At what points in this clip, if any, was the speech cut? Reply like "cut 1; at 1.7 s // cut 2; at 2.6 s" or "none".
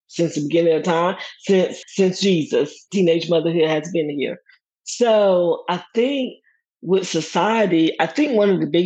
cut 1; at 1.8 s